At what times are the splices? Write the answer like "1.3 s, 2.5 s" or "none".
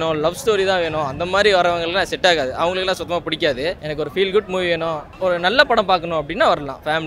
none

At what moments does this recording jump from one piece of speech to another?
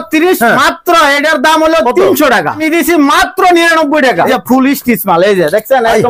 2.6 s, 4.3 s

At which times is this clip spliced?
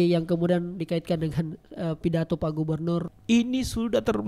3.1 s

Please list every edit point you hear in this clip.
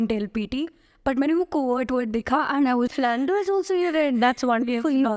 2.9 s

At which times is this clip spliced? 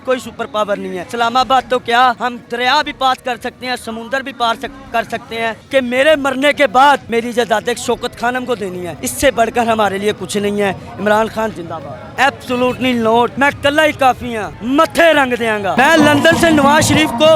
1.1 s, 5.6 s, 7.1 s, 12.1 s, 15.8 s

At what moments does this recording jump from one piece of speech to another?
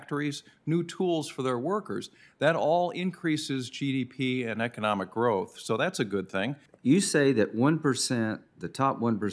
6.6 s

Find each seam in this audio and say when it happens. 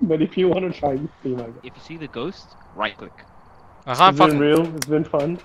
none

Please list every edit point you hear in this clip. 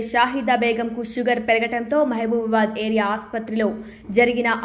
none

